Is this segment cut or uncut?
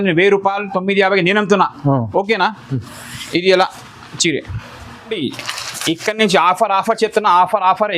cut